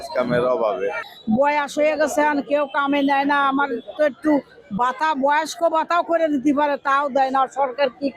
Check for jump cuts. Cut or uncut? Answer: cut